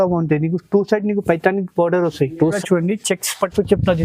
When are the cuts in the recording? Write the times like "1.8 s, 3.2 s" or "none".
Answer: 2.6 s